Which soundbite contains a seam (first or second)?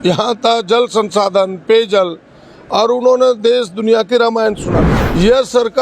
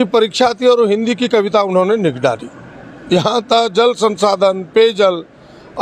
first